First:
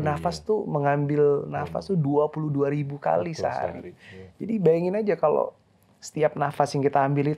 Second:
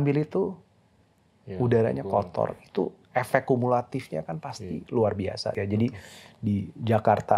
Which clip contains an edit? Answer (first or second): second